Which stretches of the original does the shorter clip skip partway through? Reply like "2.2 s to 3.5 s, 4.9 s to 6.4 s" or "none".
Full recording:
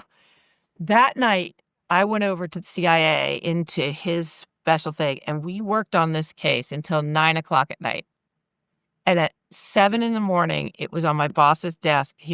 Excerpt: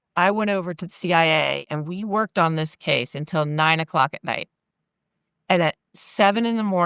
3.4 s to 5.2 s